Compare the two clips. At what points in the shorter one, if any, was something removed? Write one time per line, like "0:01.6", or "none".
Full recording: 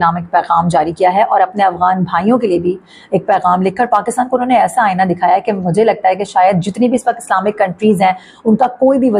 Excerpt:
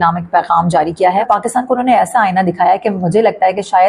0:01.2